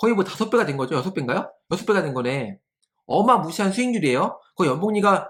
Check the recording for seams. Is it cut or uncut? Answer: uncut